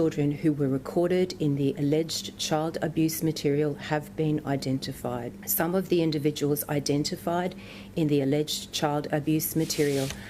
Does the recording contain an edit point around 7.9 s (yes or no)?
no